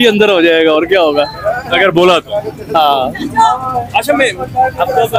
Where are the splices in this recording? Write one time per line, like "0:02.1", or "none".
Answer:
none